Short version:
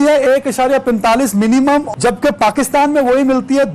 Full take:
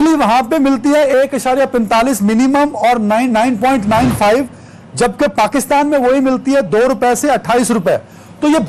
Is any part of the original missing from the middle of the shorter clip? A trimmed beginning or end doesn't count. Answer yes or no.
yes